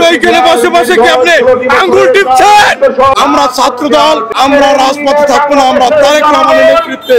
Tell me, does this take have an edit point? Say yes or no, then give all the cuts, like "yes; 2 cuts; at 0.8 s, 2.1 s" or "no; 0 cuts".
yes; 2 cuts; at 3.1 s, 4.3 s